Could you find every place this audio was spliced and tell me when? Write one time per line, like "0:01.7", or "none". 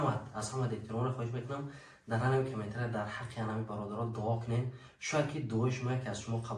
none